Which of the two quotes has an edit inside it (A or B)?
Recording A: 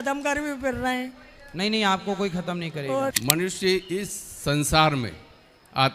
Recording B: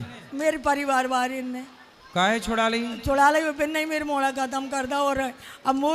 A